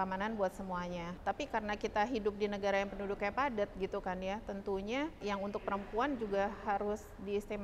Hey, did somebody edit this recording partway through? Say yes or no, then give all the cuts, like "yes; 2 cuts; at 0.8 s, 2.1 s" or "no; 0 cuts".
yes; 2 cuts; at 1.1 s, 5.2 s